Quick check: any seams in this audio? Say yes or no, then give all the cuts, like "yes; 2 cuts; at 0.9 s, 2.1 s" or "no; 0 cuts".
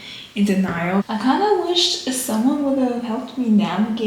yes; 1 cut; at 1.0 s